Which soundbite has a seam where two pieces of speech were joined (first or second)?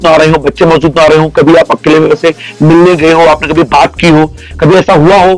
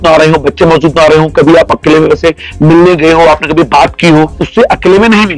second